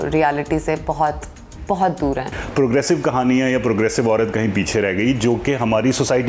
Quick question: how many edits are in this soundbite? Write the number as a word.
one